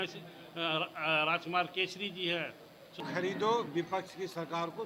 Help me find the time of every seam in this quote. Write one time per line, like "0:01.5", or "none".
0:03.0